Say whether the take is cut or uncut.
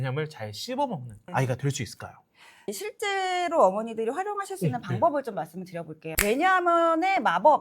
cut